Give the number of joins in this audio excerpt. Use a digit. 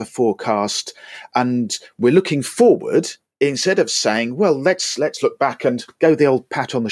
1